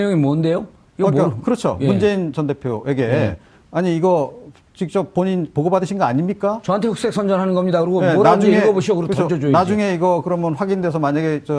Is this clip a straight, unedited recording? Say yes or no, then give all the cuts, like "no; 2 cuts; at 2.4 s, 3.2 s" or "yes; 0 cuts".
no; 1 cut; at 9.1 s